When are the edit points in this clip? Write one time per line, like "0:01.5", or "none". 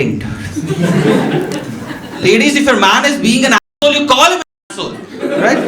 0:02.2